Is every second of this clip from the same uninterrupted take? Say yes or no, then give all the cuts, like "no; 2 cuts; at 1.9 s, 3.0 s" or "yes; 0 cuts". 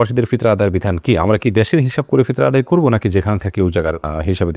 yes; 0 cuts